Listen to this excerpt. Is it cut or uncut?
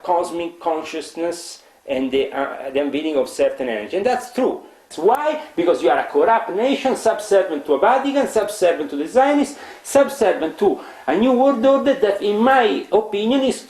cut